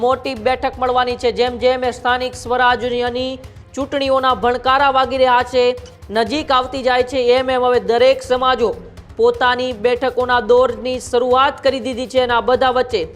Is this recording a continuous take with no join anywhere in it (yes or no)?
yes